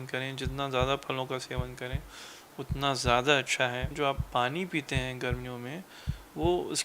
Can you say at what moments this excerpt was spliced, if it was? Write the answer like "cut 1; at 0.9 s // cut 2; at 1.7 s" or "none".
cut 1; at 3.9 s